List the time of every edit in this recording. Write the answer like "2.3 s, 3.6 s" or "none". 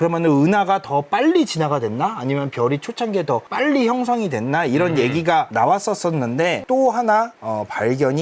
6.6 s